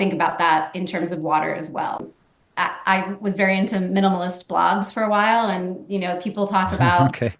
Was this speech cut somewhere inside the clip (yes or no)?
yes